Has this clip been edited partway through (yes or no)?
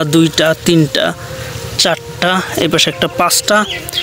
no